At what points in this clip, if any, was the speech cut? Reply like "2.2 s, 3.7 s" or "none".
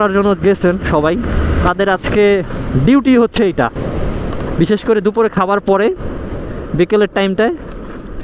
1.6 s